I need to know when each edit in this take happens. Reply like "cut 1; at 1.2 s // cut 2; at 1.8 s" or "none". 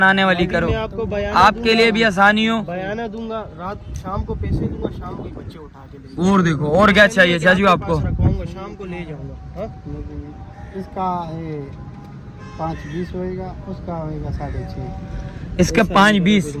none

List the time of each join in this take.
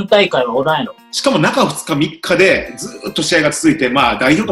cut 1; at 1.0 s

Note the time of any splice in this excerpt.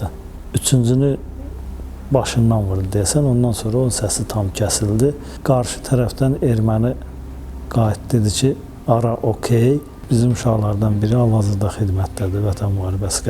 cut 1; at 5.3 s // cut 2; at 9.9 s

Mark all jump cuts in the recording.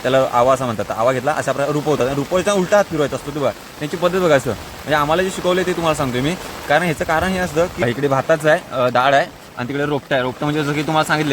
cut 1; at 7.8 s

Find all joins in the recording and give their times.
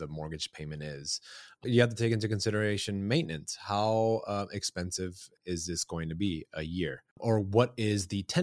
cut 1; at 1.7 s // cut 2; at 5.3 s // cut 3; at 7.1 s

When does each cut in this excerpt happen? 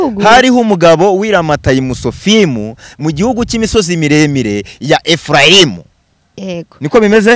none

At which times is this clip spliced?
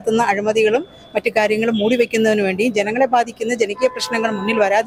none

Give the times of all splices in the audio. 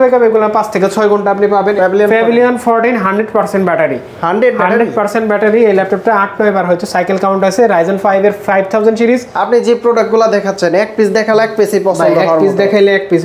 cut 1; at 1.7 s // cut 2; at 9.3 s

